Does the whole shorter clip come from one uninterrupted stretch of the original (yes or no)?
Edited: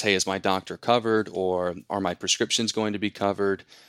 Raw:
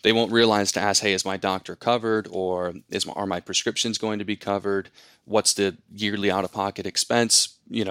no